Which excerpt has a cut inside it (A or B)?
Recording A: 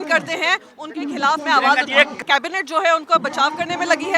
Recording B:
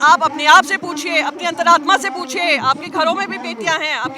A